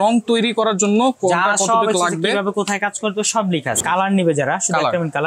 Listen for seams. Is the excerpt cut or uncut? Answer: cut